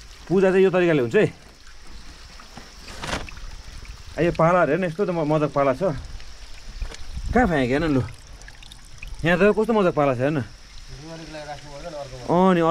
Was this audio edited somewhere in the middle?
no; 0 cuts

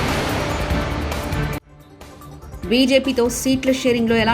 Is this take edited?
no; 0 cuts

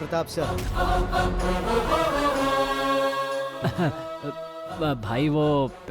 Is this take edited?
yes; 1 cut; at 3.5 s

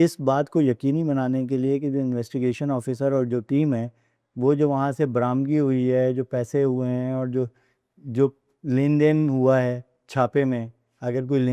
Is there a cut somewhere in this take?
no; 0 cuts

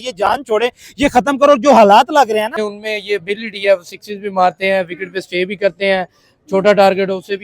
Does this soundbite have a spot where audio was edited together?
yes; 1 cut; at 2.6 s

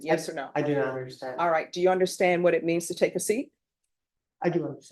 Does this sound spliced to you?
no; 0 cuts

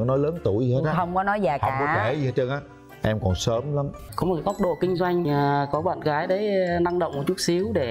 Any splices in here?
yes; 1 cut; at 4.1 s

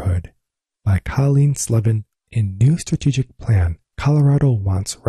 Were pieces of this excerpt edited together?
yes; 1 cut; at 2.1 s

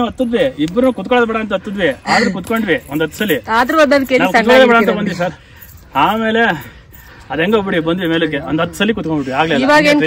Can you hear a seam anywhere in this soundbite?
no; 0 cuts

